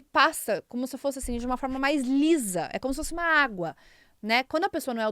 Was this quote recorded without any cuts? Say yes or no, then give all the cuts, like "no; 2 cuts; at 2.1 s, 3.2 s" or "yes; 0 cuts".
yes; 0 cuts